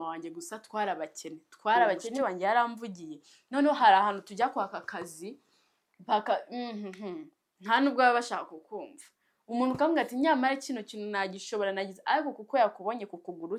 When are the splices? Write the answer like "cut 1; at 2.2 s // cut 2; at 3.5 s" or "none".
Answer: cut 1; at 2.1 s

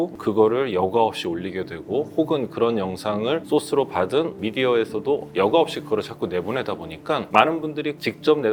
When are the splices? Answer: none

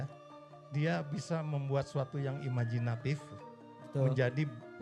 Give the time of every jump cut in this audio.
none

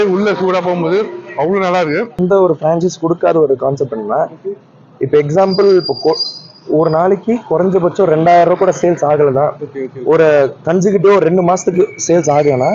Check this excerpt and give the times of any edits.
cut 1; at 2.1 s

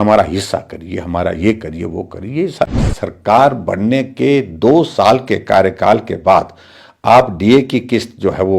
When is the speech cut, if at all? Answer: cut 1; at 2.7 s

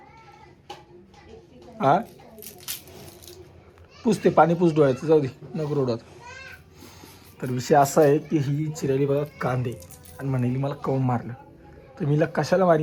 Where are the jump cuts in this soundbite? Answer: none

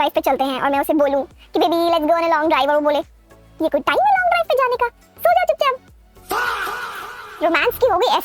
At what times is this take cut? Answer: none

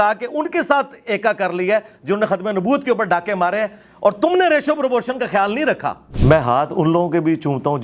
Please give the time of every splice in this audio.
cut 1; at 6.1 s

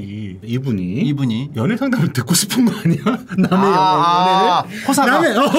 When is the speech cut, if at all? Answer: none

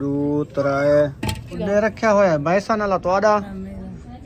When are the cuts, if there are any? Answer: cut 1; at 1.5 s

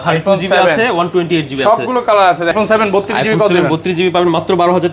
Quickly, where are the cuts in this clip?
cut 1; at 2.5 s

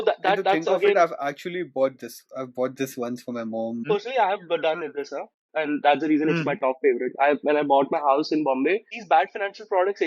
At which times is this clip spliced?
cut 1; at 3.8 s // cut 2; at 8.9 s

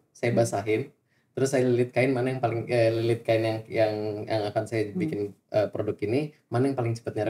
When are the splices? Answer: none

